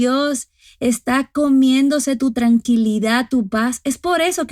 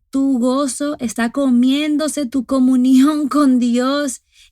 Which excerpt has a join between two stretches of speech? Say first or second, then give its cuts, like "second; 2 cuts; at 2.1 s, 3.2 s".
second; 1 cut; at 2.2 s